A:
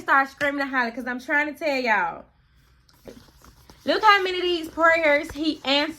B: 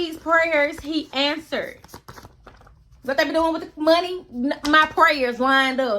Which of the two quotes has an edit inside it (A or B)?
A